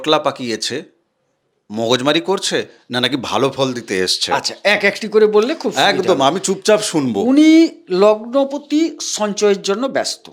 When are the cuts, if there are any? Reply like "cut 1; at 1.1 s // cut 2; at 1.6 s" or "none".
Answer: none

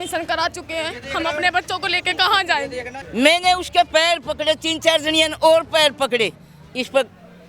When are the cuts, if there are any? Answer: cut 1; at 3.0 s

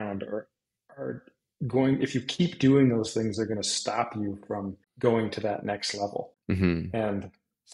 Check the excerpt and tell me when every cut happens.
cut 1; at 4.8 s // cut 2; at 6.3 s

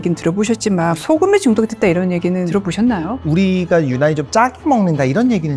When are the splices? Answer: cut 1; at 1.0 s // cut 2; at 3.0 s

